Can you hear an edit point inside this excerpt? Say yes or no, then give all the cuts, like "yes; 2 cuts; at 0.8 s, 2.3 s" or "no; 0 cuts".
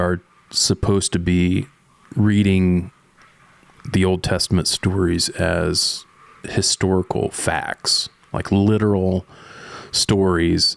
no; 0 cuts